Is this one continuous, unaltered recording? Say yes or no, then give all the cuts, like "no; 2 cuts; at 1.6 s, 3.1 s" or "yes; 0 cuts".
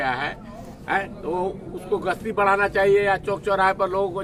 yes; 0 cuts